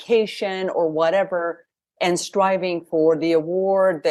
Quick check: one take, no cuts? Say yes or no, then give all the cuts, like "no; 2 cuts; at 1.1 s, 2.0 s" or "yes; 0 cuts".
yes; 0 cuts